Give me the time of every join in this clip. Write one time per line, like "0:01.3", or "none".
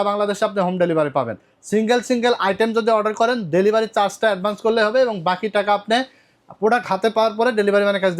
none